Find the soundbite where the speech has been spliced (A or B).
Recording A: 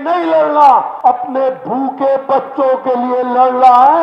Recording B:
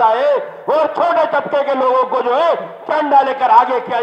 A